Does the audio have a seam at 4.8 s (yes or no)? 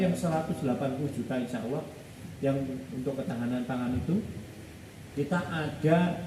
no